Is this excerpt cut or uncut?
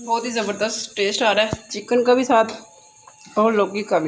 uncut